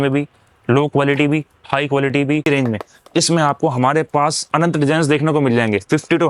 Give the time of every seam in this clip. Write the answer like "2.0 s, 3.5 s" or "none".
2.4 s